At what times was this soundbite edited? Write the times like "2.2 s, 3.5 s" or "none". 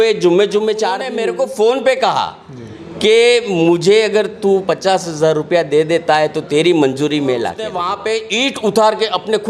1.1 s, 7.8 s